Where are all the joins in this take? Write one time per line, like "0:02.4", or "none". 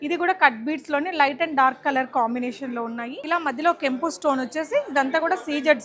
0:03.1